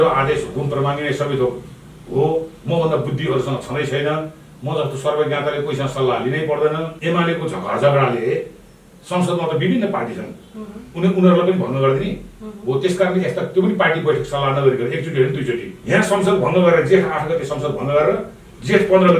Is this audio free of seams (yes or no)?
no